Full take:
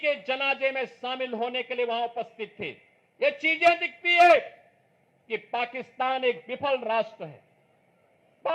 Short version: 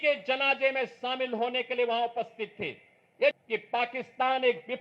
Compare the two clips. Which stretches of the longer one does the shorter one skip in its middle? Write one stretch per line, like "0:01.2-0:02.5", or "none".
0:03.5-0:05.3